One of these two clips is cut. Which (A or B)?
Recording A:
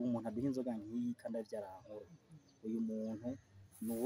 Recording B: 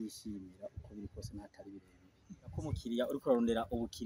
B